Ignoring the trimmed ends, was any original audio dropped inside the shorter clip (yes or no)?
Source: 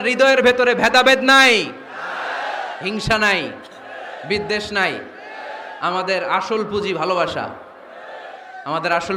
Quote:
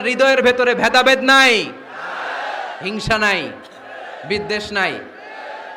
no